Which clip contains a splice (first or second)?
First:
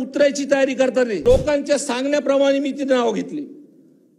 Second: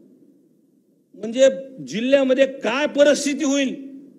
first